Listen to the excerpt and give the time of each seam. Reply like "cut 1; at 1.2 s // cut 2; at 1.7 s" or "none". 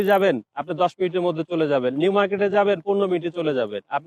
none